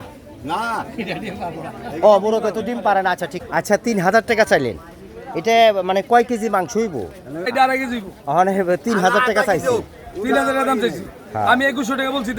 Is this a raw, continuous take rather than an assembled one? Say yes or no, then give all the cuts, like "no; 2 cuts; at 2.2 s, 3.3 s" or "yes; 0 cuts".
no; 2 cuts; at 3.3 s, 7.5 s